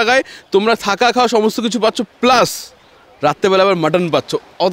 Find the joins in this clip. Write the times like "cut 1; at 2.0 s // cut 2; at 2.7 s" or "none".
none